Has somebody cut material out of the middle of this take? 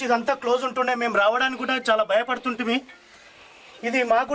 no; 0 cuts

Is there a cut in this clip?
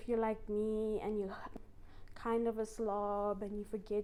no; 0 cuts

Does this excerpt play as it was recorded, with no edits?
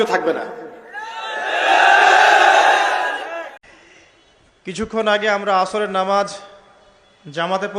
no; 1 cut; at 3.6 s

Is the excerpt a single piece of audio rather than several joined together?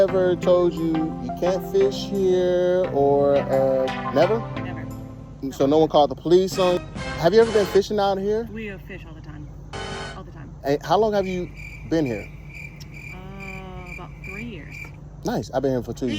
no; 1 cut; at 6.8 s

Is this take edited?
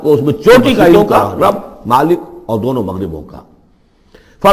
yes; 1 cut; at 0.9 s

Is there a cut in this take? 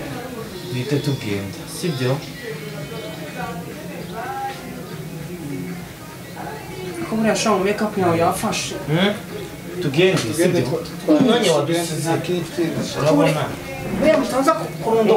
no; 0 cuts

